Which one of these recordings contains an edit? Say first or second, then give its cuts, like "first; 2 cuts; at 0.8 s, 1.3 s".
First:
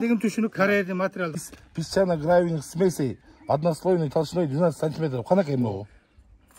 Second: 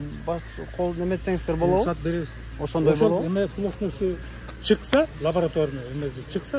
first; 1 cut; at 1.5 s